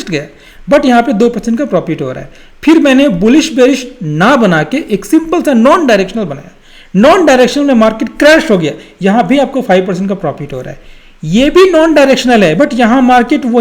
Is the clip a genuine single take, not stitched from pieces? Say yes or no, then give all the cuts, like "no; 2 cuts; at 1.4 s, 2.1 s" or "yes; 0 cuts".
yes; 0 cuts